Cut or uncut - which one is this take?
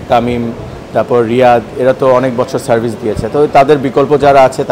uncut